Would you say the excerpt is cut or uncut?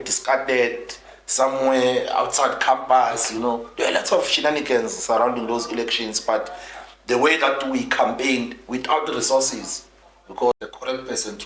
cut